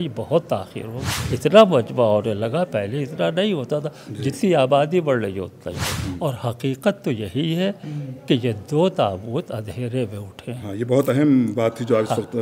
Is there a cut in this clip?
yes; 2 cuts; at 1.1 s, 5.9 s

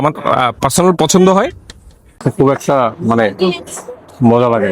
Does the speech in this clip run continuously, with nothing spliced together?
no; 1 cut; at 2.3 s

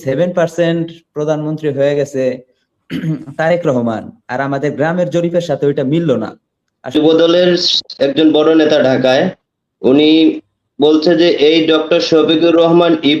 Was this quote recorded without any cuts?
no; 1 cut; at 6.9 s

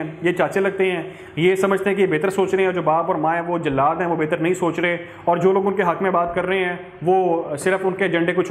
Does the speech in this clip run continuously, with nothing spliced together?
yes; 0 cuts

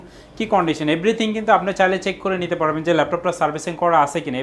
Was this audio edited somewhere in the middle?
no; 0 cuts

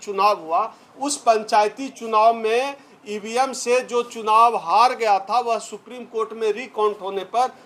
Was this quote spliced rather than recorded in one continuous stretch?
no; 0 cuts

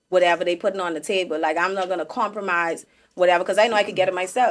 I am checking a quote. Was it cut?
no; 0 cuts

